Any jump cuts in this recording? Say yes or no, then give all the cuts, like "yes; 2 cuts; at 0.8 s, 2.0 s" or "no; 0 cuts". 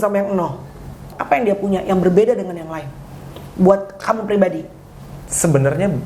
yes; 1 cut; at 1.1 s